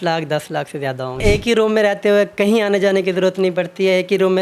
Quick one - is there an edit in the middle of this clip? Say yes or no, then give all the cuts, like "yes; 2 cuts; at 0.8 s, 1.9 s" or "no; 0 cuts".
yes; 1 cut; at 1.2 s